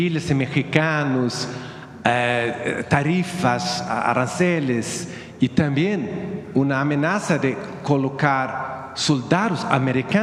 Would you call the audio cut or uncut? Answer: uncut